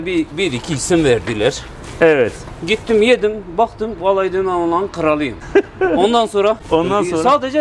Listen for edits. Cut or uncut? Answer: uncut